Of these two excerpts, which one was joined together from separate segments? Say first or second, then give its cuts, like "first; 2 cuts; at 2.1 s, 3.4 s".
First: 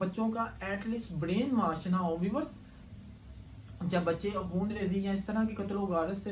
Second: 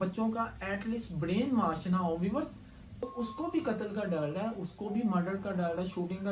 second; 1 cut; at 3.1 s